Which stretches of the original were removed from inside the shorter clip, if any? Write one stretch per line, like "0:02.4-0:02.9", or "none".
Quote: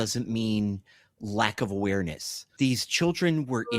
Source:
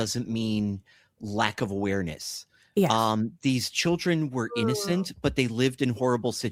0:02.5-0:03.3

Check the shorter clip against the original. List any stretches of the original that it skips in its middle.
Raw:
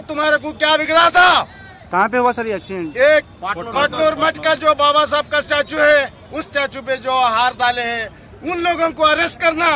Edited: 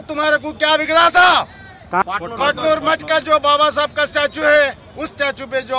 0:02.0-0:03.4

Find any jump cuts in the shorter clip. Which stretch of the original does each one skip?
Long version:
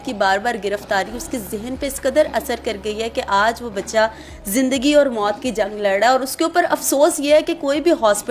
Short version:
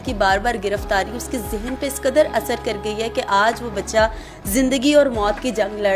none

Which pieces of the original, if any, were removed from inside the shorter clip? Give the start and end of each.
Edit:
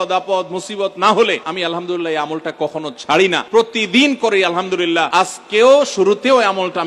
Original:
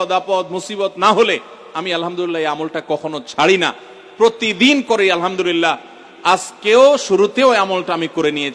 0:01.5-0:01.8
0:03.7-0:04.1
0:05.8-0:06.2

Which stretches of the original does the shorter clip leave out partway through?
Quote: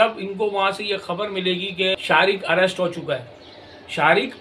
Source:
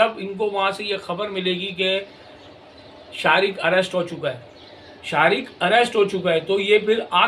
0:01.9-0:03.1

